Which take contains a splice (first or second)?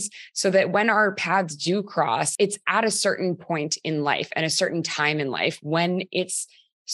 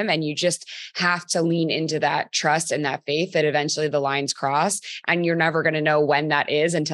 first